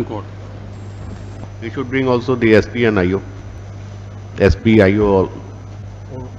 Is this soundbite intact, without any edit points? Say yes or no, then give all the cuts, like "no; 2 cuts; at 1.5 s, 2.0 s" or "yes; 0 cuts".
no; 1 cut; at 1.4 s